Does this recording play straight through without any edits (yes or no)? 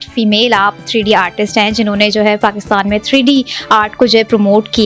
yes